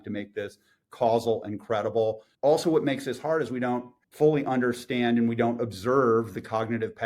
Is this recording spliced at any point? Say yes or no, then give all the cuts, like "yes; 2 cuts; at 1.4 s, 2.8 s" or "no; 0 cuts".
yes; 2 cuts; at 2.3 s, 4.0 s